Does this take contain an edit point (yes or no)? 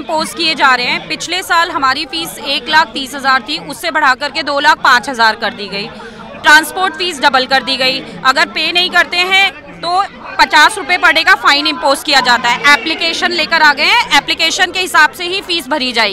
no